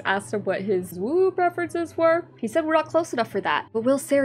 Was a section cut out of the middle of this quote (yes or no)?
yes